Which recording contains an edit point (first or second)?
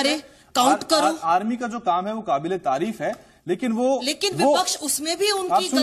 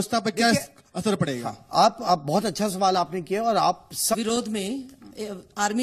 second